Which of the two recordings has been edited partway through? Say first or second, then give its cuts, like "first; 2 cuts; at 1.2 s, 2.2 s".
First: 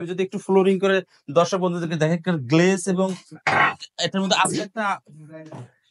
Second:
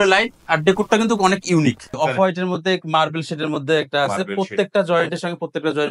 second; 1 cut; at 1.9 s